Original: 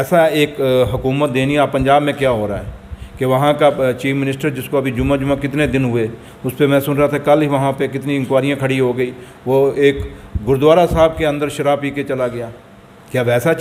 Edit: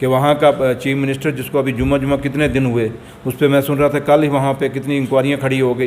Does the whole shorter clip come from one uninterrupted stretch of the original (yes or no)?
yes